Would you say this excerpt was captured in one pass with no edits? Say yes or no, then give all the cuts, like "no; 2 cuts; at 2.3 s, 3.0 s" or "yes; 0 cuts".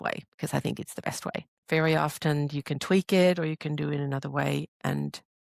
no; 1 cut; at 1.5 s